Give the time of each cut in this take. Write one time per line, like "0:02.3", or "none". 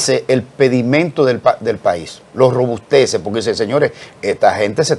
none